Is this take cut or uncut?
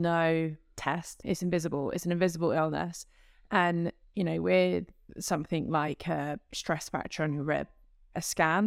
cut